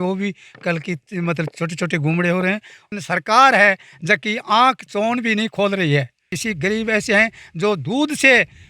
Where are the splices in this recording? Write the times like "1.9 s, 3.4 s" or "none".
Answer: 2.8 s, 6.4 s